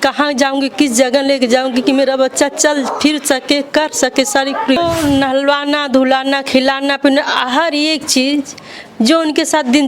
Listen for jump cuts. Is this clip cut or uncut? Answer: cut